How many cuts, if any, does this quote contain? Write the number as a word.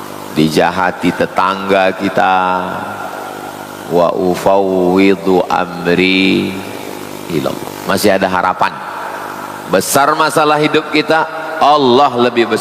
one